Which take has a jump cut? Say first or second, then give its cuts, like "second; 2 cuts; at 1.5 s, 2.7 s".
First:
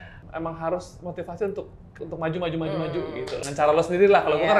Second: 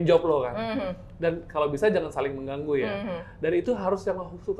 first; 2 cuts; at 2.0 s, 3.4 s